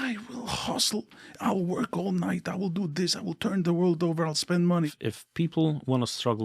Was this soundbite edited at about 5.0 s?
yes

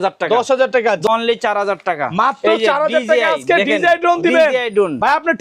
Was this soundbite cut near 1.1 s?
yes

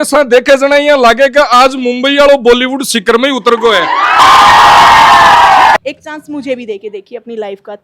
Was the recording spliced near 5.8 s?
yes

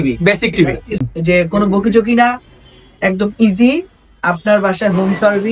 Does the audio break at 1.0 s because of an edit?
yes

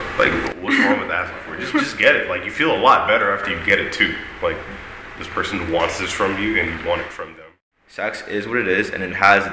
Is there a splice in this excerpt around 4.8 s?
no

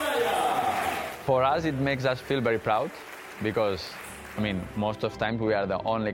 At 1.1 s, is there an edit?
yes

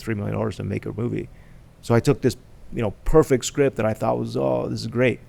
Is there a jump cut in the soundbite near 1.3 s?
no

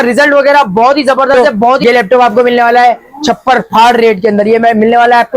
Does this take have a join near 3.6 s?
no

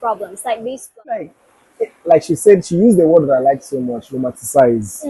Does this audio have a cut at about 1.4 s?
yes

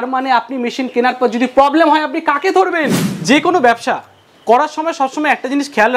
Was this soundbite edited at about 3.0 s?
yes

